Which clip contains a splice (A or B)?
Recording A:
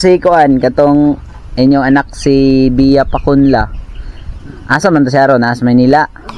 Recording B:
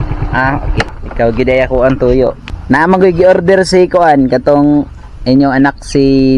B